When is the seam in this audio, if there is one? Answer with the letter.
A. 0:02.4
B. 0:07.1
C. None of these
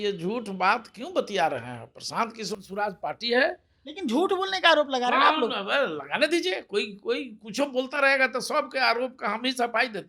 A